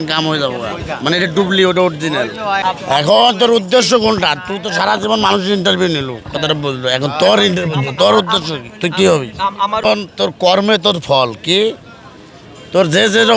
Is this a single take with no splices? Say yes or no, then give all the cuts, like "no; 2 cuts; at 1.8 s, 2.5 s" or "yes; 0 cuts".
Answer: no; 2 cuts; at 2.6 s, 9.8 s